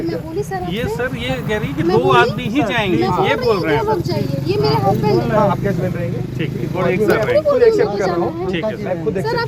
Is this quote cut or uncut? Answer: uncut